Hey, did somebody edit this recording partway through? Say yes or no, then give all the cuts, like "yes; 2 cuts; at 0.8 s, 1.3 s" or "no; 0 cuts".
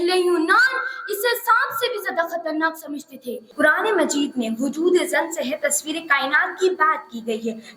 yes; 1 cut; at 3.4 s